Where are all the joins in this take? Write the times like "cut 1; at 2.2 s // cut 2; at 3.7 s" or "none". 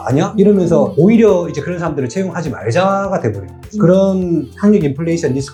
none